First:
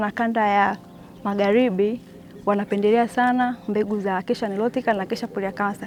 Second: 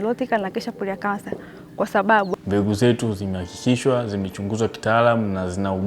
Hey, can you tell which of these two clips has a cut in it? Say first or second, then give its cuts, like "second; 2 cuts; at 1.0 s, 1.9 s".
second; 1 cut; at 2.3 s